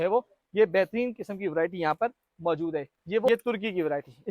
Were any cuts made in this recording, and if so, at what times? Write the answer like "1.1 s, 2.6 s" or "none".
3.3 s